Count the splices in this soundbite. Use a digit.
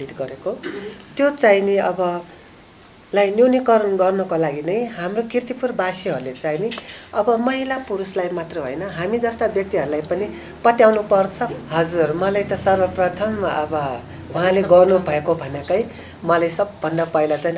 1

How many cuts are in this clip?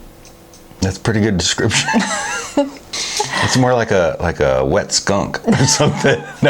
1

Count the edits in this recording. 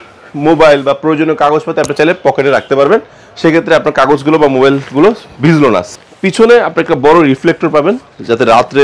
1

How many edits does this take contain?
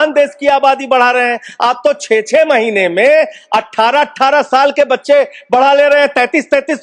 0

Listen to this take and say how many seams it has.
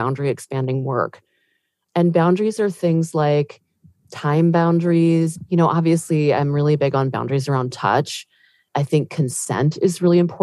2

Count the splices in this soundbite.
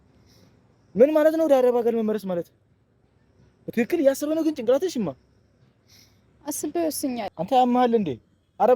1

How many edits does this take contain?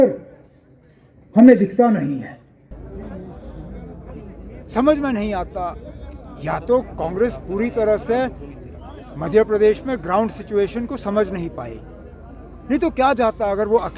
1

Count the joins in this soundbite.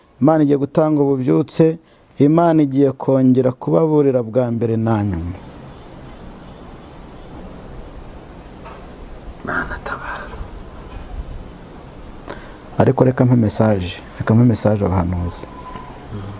0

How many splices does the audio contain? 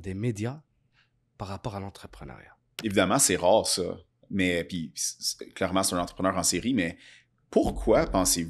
1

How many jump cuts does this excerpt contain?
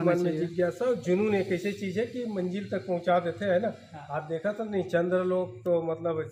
0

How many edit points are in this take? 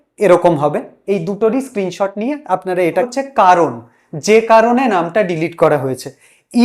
1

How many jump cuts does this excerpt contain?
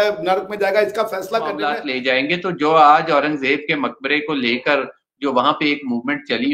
1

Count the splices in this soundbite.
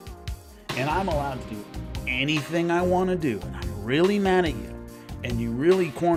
0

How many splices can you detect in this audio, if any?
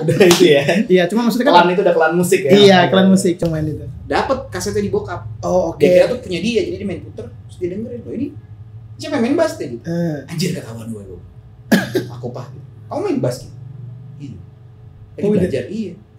1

